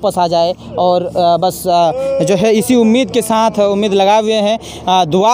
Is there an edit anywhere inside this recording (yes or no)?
no